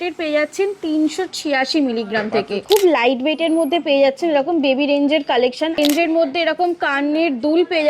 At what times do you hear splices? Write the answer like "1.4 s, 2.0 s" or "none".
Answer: 2.6 s, 5.8 s

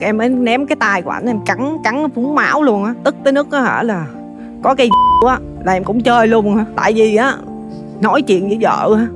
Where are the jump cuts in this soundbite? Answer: none

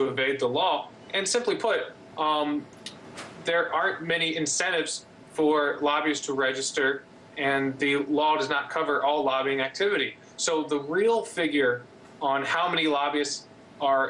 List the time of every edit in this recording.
4.0 s

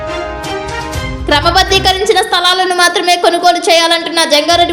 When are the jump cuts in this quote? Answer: none

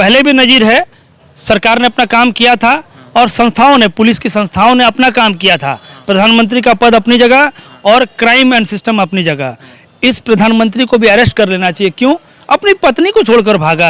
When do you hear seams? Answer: none

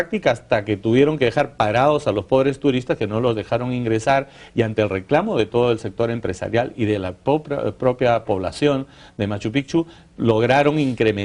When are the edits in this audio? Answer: 5.9 s

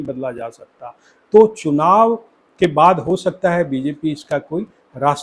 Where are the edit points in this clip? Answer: none

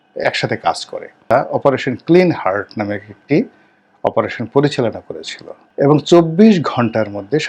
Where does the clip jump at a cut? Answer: 1.3 s

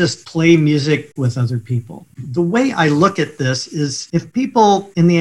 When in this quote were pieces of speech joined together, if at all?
1.1 s

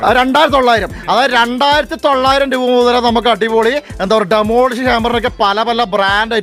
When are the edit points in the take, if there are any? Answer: none

